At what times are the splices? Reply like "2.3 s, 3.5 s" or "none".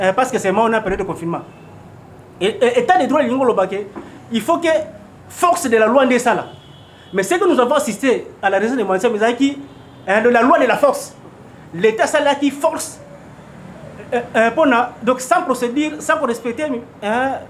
none